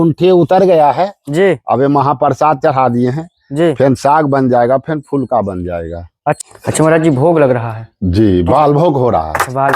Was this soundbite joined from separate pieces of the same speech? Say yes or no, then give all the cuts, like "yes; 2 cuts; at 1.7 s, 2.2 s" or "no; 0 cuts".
yes; 1 cut; at 6.4 s